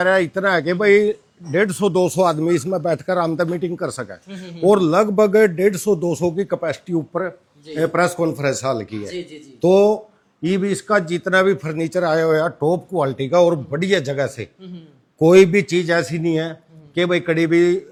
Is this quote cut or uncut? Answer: uncut